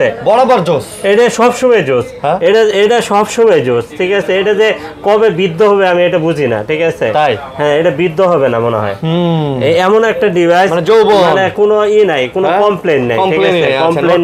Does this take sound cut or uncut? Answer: uncut